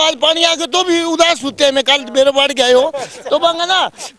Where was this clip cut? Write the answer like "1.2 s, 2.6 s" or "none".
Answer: none

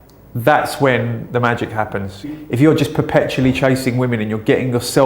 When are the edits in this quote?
2.3 s

